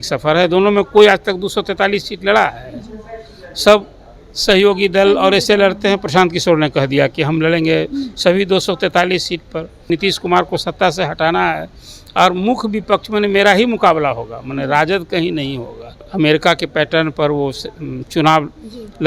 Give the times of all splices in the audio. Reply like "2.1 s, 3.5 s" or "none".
9.9 s, 16.0 s